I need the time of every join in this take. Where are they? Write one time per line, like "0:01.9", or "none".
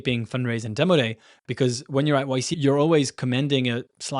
0:02.5